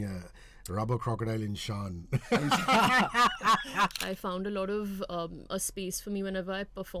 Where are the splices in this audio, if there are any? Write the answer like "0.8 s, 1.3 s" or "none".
4.0 s